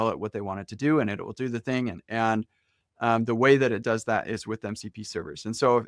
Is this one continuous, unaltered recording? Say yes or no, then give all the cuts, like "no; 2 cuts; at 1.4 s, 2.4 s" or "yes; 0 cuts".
yes; 0 cuts